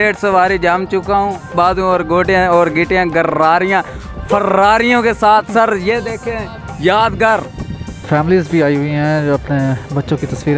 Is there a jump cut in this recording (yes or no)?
yes